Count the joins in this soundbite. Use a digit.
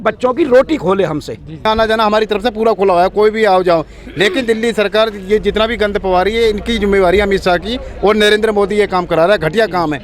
1